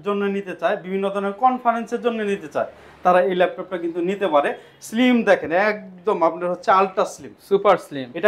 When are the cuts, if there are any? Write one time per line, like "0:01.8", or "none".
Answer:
none

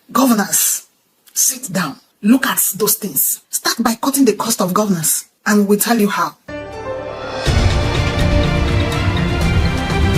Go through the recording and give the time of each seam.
0:06.4

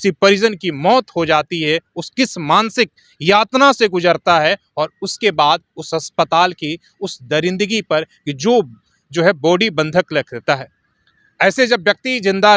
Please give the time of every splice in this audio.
none

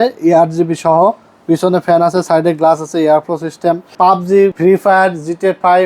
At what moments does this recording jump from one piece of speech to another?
0:04.1

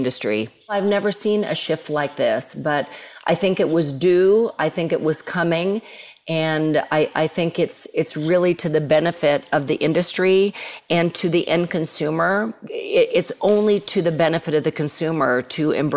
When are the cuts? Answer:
0:00.7
0:12.6

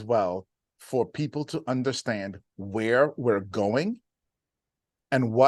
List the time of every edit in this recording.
none

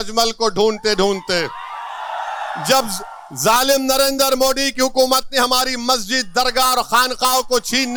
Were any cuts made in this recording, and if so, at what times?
none

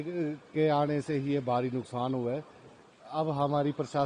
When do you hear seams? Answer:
none

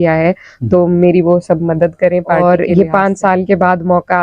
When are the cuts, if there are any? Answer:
0:02.4

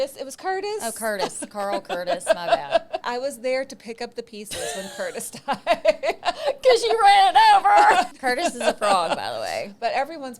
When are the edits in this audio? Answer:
0:03.0
0:06.2
0:08.1

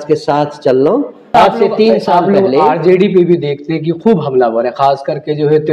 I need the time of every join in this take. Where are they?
0:01.3

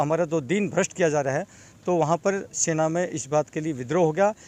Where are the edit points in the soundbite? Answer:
none

